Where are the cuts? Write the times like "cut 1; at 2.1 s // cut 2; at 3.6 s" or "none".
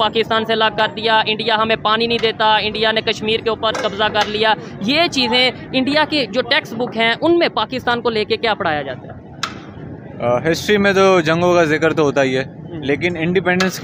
none

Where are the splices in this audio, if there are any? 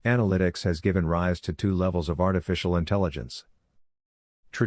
cut 1; at 2.4 s

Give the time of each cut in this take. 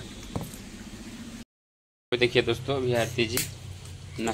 cut 1; at 1.5 s

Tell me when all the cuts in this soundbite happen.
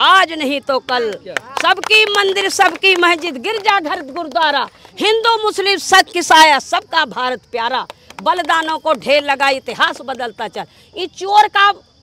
none

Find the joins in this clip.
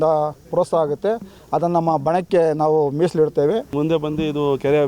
cut 1; at 3.7 s

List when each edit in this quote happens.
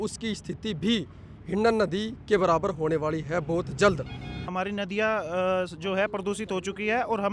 cut 1; at 4.5 s

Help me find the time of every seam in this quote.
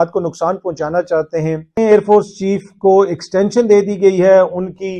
cut 1; at 1.8 s

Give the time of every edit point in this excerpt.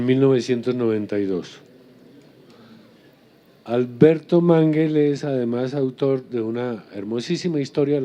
none

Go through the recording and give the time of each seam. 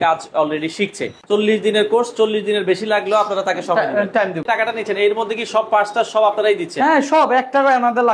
cut 1; at 1.1 s // cut 2; at 4.4 s

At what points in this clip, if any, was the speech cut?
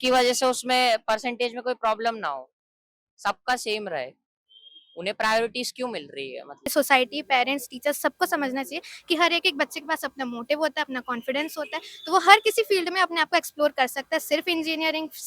cut 1; at 6.7 s

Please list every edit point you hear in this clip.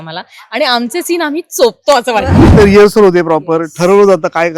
cut 1; at 2.3 s

